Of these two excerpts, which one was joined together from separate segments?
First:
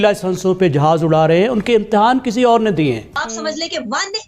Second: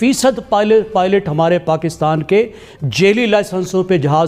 first; 1 cut; at 3.2 s

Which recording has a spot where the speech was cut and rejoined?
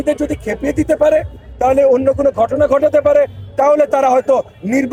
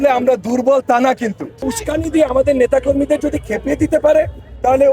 second; 1 cut; at 1.6 s

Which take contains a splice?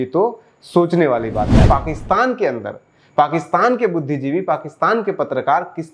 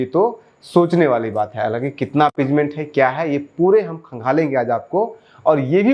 first; 1 cut; at 1.6 s

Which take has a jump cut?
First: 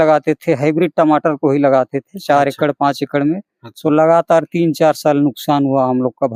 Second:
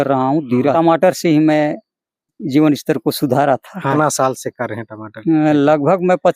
second; 3 cuts; at 0.7 s, 2.4 s, 3.9 s

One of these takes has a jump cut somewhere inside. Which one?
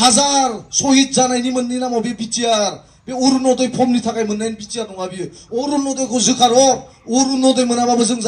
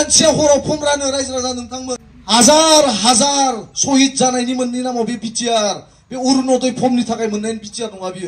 second; 1 cut; at 2.1 s

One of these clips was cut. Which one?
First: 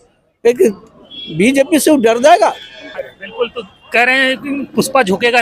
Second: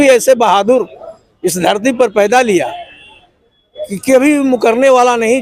first; 1 cut; at 2.9 s

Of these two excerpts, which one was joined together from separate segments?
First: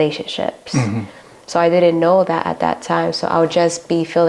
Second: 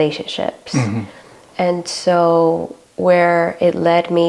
first; 1 cut; at 1.4 s

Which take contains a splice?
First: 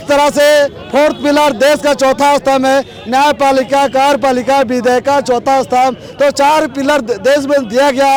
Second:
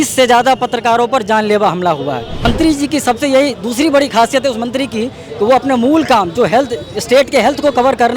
second; 1 cut; at 2.5 s

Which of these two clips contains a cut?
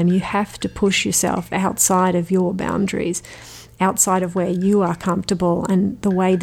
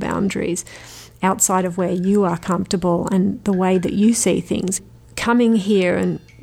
second; 1 cut; at 4.9 s

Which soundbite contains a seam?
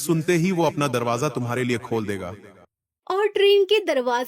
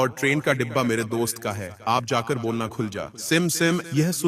first; 1 cut; at 3.0 s

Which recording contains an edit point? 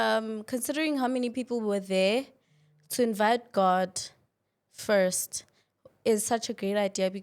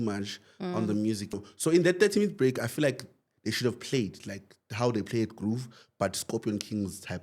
second; 1 cut; at 1.4 s

